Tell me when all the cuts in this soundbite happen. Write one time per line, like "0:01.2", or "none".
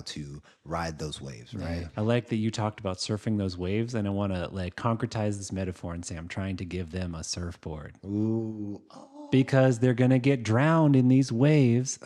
0:01.9